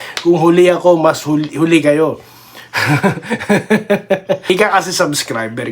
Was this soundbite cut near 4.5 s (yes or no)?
yes